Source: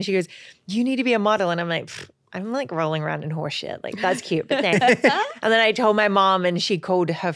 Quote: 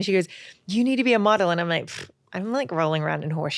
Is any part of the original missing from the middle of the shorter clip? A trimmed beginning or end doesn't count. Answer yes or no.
no